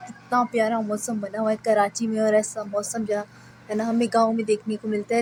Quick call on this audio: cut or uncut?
uncut